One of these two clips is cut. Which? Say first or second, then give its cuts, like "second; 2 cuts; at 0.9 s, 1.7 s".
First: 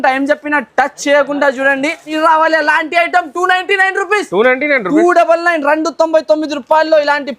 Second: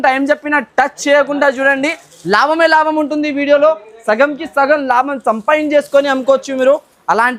first; 1 cut; at 2.1 s